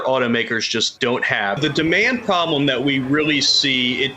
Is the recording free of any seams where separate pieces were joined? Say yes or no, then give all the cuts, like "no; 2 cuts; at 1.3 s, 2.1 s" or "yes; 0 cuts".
no; 1 cut; at 1.6 s